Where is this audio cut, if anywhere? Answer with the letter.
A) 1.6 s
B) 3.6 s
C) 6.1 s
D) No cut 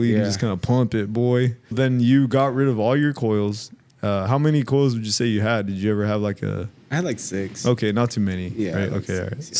D